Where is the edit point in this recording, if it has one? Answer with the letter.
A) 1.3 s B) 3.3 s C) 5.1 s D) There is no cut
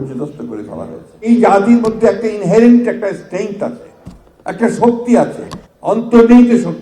A